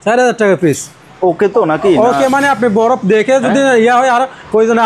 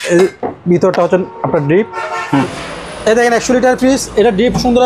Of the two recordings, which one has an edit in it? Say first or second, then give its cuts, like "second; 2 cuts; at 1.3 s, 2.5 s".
second; 1 cut; at 2.4 s